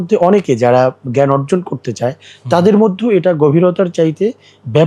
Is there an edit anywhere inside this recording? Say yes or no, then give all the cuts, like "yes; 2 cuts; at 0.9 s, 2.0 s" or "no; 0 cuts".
no; 0 cuts